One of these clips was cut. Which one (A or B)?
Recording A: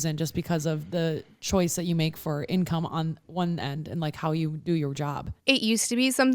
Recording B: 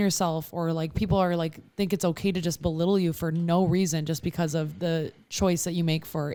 A